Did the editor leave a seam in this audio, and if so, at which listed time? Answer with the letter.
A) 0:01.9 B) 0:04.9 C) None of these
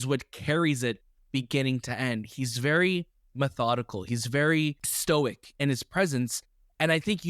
B